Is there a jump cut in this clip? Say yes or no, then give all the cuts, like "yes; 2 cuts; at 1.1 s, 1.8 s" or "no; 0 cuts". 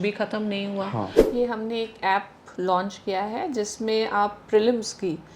yes; 1 cut; at 1.2 s